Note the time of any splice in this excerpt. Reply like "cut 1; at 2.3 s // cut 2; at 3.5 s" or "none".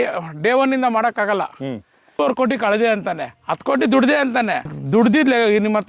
cut 1; at 2.2 s // cut 2; at 4.7 s